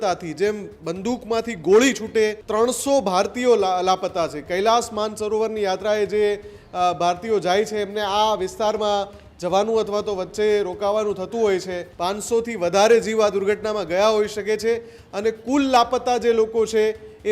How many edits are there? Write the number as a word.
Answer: two